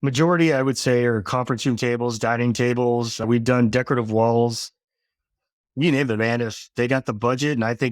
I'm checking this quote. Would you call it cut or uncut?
cut